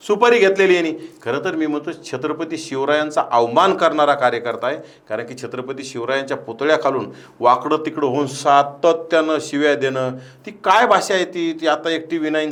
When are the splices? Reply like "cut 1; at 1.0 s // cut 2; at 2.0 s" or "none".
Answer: none